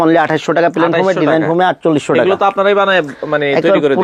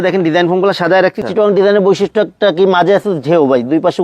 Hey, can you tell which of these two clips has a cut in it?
second; 1 cut; at 1.2 s

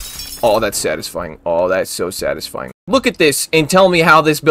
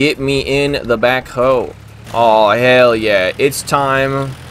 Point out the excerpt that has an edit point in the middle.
first; 1 cut; at 2.6 s

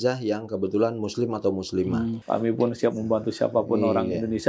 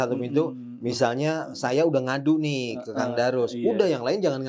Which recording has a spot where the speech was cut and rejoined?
first; 1 cut; at 2.2 s

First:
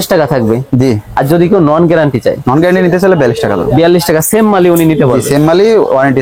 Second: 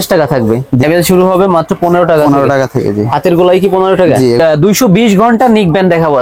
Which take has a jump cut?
second; 2 cuts; at 0.8 s, 4.4 s

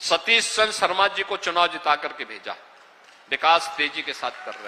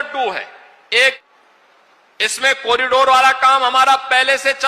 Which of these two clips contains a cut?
second; 1 cut; at 1.2 s

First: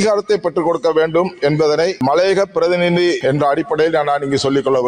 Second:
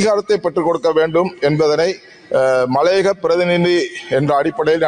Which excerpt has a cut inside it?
first; 2 cuts; at 2.0 s, 3.2 s

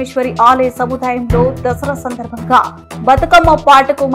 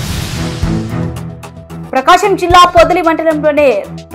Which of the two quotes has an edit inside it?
second; 1 cut; at 1.1 s

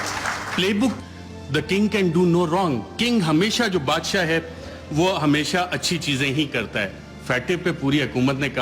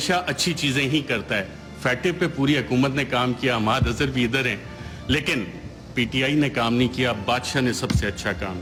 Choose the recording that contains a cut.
first; 1 cut; at 1.0 s

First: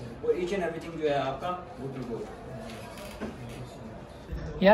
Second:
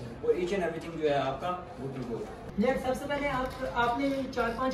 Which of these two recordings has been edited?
second; 1 cut; at 2.4 s

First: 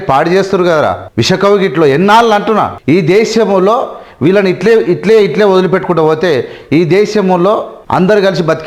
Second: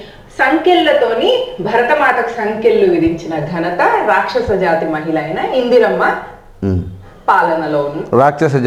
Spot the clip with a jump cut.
first; 3 cuts; at 1.0 s, 2.7 s, 7.8 s

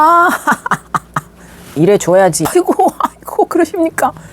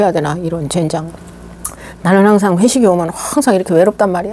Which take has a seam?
first; 1 cut; at 2.5 s

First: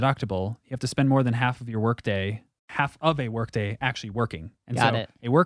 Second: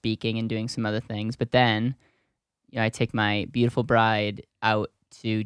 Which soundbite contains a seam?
first; 1 cut; at 2.7 s

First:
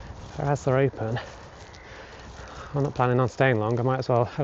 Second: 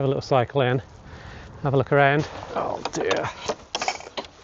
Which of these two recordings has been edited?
second; 1 cut; at 2.4 s

